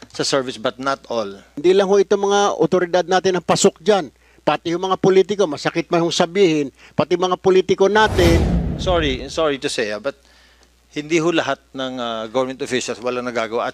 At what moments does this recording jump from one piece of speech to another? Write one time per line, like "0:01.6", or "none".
0:01.5
0:08.5